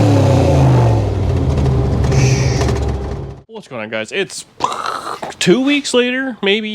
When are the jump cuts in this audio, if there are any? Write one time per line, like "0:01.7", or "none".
0:03.1